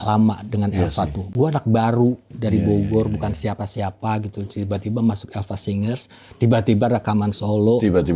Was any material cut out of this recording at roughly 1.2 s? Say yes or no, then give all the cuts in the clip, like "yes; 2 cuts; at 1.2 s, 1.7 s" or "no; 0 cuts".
yes; 1 cut; at 1.2 s